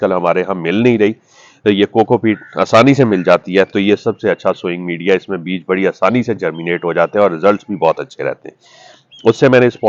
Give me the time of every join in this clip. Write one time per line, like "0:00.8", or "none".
none